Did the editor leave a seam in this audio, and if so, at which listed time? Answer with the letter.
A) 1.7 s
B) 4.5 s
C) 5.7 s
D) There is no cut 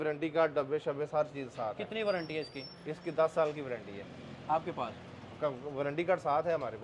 D